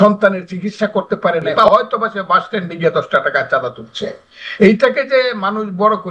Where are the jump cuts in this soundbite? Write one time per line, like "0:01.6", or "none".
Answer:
0:01.6

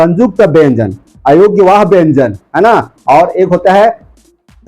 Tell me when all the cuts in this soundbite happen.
none

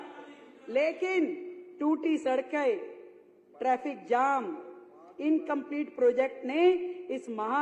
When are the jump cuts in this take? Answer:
none

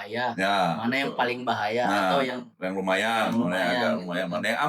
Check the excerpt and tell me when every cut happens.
none

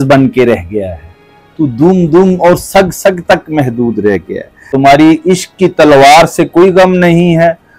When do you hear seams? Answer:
0:04.6

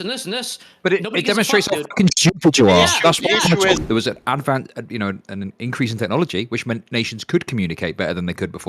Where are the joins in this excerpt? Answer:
0:03.8

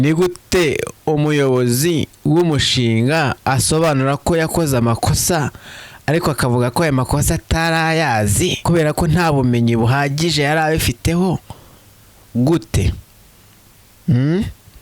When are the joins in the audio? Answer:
0:00.9
0:02.1
0:08.6

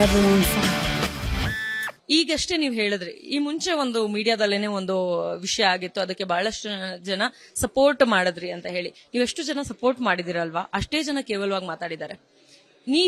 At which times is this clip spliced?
0:01.9

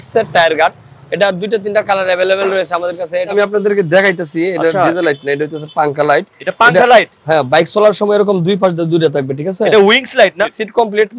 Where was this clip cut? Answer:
0:03.3
0:10.4

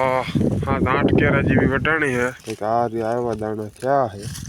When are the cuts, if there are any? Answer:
0:02.4

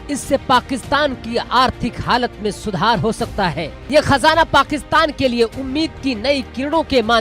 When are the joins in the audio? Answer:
0:03.7

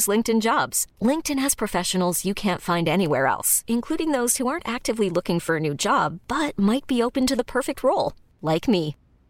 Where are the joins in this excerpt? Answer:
none

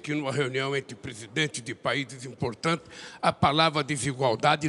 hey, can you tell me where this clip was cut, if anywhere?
none

